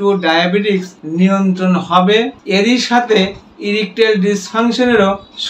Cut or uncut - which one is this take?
cut